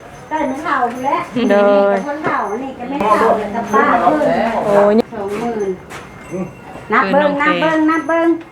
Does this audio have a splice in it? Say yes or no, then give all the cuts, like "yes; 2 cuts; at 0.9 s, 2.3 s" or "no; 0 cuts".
yes; 1 cut; at 5.0 s